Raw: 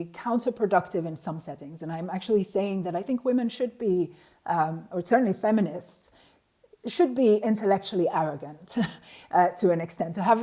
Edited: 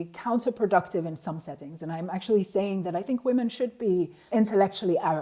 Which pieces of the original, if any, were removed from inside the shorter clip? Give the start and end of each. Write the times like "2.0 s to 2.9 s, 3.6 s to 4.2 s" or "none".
4.3 s to 7.4 s